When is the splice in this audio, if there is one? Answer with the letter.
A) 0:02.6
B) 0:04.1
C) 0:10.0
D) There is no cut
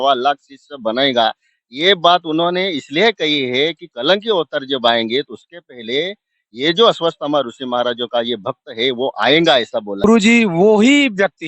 C